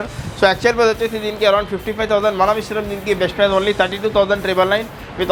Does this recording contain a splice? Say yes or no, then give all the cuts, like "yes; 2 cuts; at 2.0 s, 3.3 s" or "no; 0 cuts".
no; 0 cuts